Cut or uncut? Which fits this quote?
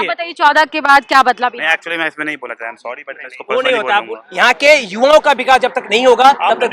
cut